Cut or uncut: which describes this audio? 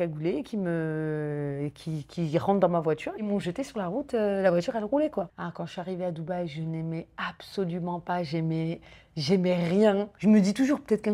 cut